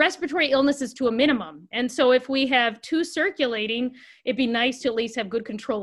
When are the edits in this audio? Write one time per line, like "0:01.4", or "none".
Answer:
none

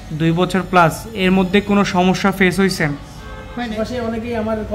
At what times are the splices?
0:03.7

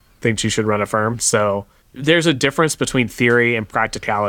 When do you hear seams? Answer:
0:01.8

